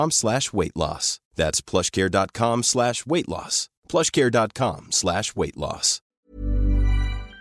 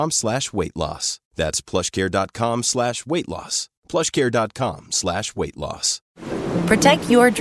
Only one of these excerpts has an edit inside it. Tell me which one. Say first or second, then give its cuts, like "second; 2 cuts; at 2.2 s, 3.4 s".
first; 1 cut; at 6.2 s